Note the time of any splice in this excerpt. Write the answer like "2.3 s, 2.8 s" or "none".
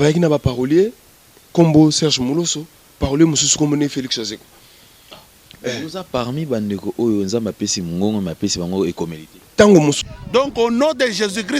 10.1 s